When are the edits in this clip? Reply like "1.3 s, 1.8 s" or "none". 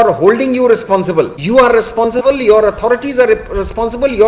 1.4 s